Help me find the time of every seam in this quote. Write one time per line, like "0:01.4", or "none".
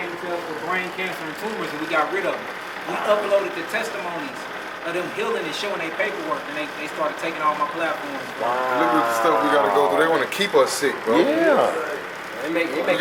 none